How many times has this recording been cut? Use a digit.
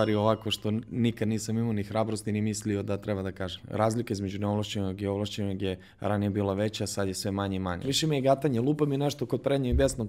2